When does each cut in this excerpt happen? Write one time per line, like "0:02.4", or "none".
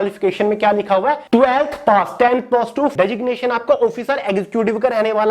0:01.2
0:02.9